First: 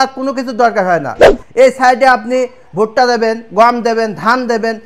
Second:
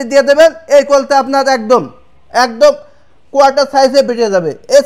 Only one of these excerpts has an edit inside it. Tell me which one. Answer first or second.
first